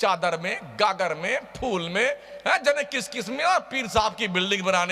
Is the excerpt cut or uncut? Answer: uncut